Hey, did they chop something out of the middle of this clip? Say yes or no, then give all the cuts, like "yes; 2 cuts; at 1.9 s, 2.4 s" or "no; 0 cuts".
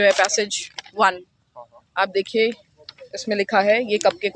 no; 0 cuts